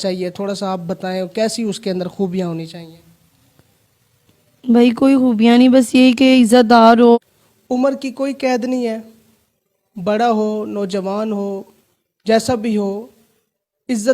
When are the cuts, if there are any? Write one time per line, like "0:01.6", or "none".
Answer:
0:07.2